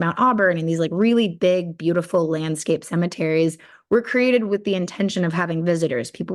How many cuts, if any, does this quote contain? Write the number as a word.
zero